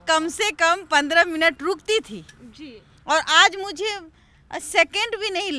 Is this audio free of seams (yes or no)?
yes